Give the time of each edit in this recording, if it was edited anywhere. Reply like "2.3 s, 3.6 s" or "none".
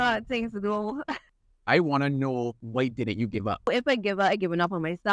1.4 s, 2.6 s, 3.7 s